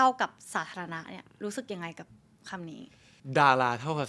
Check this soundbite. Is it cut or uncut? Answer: uncut